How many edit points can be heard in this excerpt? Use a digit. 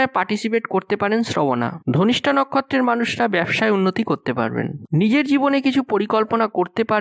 1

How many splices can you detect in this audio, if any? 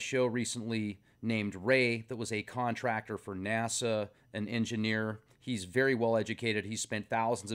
1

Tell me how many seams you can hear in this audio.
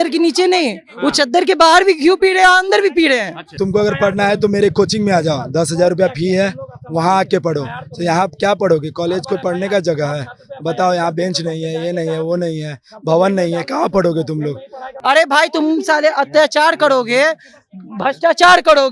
2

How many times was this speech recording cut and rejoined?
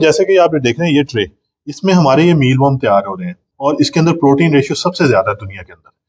1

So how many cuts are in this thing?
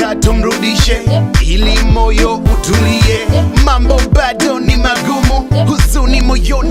0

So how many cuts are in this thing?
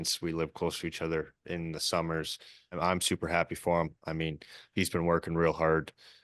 1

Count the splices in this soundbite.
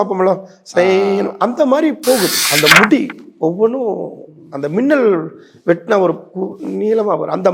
1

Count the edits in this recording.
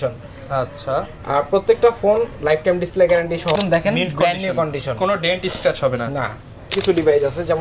2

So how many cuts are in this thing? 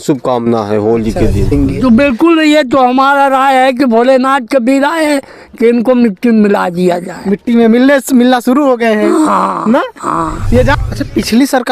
2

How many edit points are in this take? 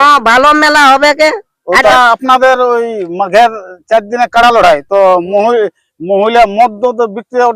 1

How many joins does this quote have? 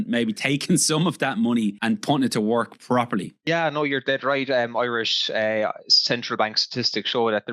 2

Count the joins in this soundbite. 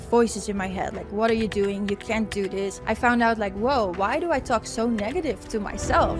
1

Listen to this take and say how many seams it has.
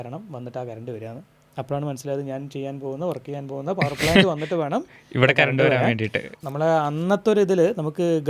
1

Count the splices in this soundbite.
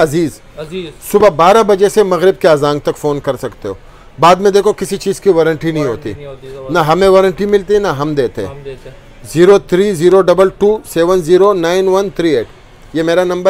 0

